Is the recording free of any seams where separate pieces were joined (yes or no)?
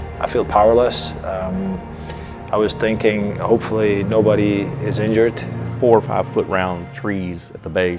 no